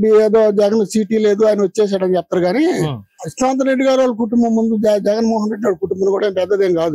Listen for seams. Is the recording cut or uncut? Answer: uncut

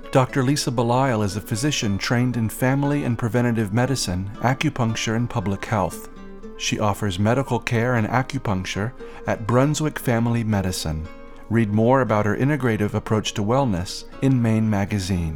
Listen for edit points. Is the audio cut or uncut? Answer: uncut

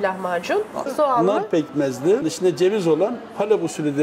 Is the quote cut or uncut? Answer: cut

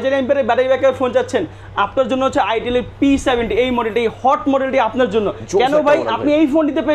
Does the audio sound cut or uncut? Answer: uncut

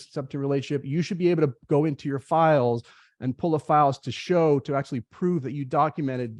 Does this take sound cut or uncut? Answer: uncut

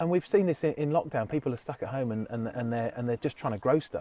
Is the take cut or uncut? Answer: uncut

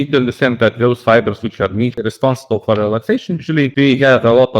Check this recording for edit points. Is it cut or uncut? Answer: cut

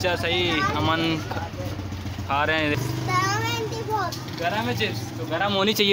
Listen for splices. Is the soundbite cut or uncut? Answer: cut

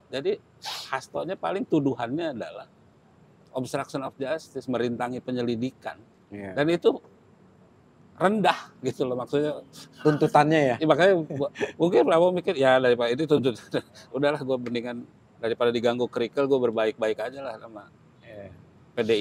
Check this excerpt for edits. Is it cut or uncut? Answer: uncut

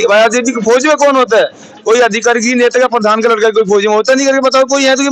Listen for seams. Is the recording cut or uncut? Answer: uncut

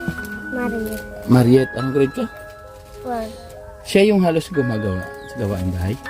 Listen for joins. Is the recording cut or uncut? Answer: uncut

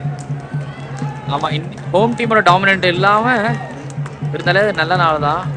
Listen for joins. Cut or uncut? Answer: uncut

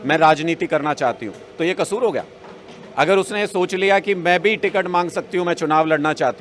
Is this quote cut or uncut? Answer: uncut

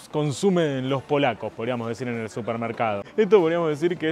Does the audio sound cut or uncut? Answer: uncut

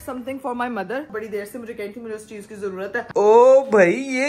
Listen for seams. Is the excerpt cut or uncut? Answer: cut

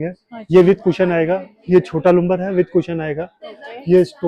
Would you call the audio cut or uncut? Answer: uncut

